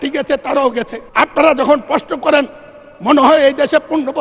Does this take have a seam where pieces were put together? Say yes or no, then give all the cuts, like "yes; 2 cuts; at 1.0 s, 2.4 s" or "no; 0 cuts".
yes; 1 cut; at 1.0 s